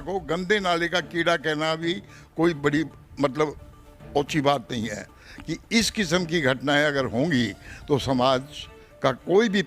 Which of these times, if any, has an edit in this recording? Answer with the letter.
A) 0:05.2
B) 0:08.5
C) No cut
A